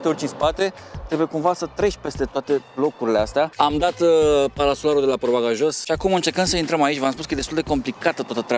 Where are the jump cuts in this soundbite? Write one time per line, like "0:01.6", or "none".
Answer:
0:03.5
0:05.8